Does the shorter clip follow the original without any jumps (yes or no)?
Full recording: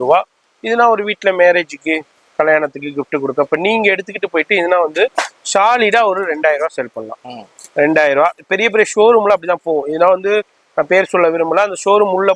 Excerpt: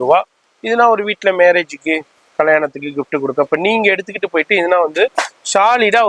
yes